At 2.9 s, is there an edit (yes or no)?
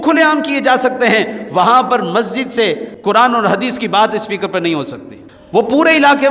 yes